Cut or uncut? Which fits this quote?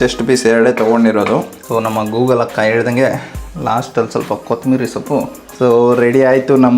cut